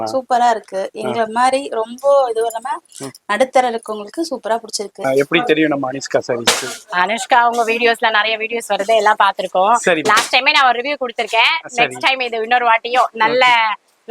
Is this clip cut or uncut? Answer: cut